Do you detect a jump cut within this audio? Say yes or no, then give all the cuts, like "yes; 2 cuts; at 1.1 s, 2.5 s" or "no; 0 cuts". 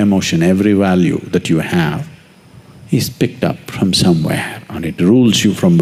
no; 0 cuts